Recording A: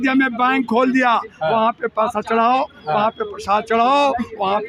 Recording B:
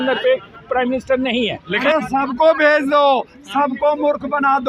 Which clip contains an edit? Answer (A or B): B